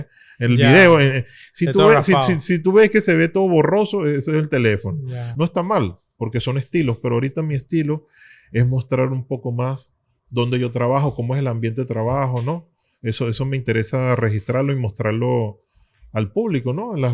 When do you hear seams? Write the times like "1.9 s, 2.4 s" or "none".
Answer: 5.2 s